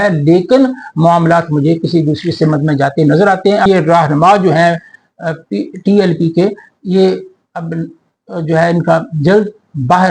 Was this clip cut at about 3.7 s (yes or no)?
yes